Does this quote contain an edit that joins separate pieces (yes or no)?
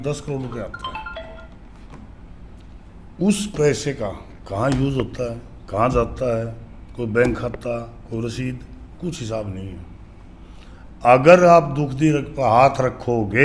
no